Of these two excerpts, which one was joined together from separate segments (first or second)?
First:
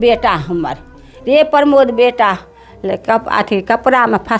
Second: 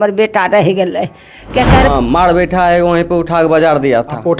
second